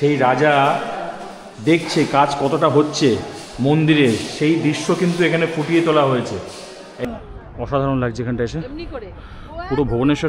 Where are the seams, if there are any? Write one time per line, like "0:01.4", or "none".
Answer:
0:07.0

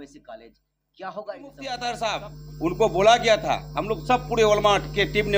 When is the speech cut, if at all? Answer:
0:01.8

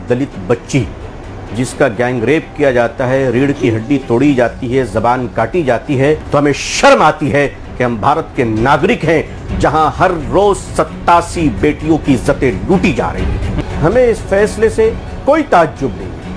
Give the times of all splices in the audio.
0:06.2
0:13.5

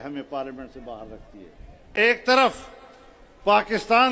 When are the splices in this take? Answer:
0:01.9

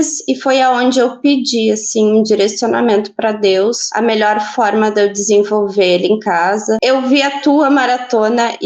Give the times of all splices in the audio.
0:06.8

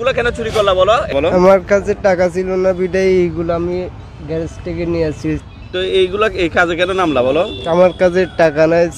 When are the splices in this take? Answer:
0:01.1
0:05.4

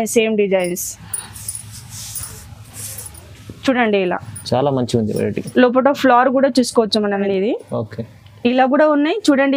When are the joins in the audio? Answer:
0:07.2

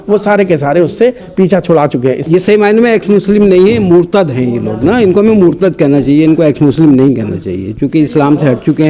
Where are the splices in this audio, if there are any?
0:02.2

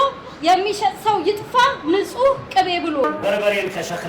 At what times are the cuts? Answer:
0:03.1

